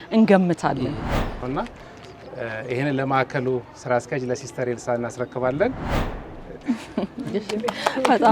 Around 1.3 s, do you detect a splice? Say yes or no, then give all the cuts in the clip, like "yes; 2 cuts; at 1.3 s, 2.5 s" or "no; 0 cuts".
yes; 1 cut; at 1.3 s